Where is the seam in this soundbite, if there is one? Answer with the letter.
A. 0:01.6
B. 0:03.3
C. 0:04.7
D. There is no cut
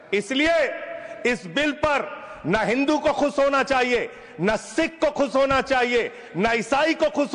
D